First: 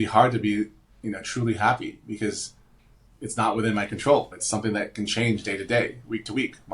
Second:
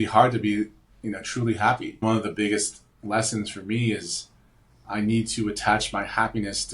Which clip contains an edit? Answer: second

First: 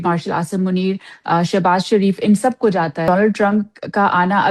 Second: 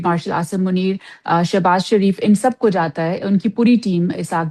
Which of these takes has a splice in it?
first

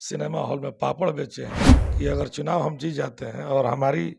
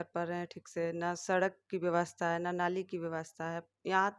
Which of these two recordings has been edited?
first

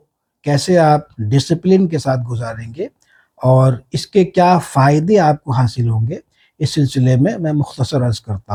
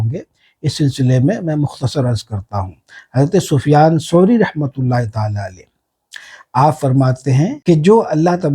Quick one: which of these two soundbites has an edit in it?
second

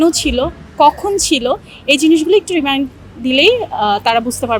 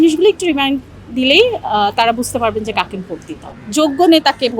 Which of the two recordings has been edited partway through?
second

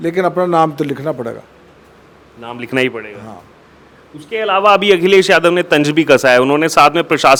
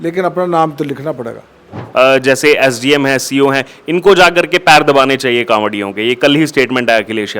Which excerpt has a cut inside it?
second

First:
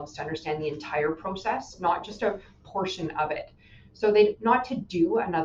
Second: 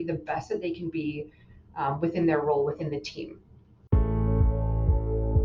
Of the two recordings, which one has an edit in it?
second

